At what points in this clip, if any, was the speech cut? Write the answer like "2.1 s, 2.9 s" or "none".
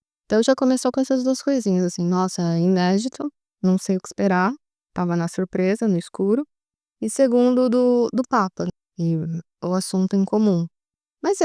8.7 s